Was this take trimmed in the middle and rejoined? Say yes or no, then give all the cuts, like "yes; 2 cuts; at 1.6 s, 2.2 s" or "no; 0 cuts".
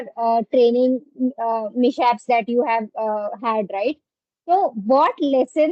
no; 0 cuts